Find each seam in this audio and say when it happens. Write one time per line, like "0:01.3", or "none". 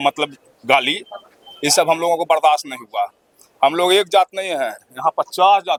none